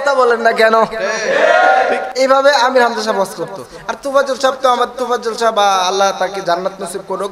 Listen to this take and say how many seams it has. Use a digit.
0